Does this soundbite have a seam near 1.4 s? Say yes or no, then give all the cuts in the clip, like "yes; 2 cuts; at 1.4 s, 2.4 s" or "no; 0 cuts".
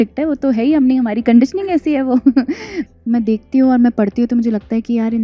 no; 1 cut; at 2.7 s